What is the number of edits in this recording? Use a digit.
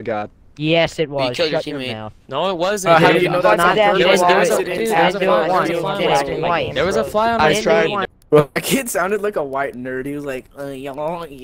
1